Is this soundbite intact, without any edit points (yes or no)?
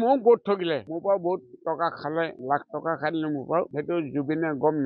no